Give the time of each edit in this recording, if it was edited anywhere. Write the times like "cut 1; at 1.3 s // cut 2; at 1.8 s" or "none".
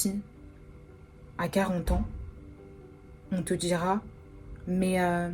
none